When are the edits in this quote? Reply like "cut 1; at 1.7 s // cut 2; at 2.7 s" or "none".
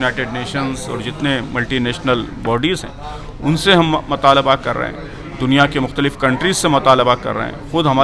none

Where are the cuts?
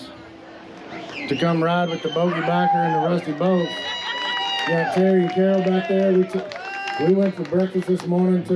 none

